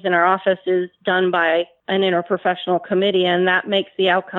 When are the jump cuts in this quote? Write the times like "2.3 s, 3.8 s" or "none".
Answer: 1.8 s